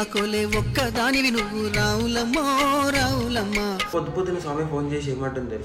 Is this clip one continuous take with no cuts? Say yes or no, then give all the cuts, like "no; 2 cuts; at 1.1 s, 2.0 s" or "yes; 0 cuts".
no; 1 cut; at 3.9 s